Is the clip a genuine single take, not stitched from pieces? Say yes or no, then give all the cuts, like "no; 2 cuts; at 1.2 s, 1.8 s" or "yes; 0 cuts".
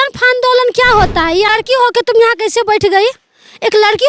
no; 1 cut; at 1.5 s